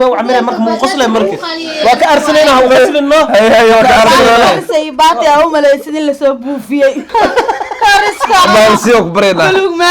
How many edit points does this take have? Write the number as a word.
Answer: one